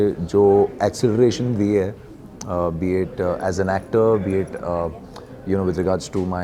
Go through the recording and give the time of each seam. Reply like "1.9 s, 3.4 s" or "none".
none